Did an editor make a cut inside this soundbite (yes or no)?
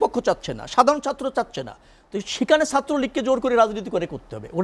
no